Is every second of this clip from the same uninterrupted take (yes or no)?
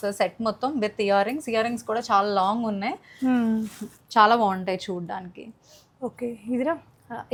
yes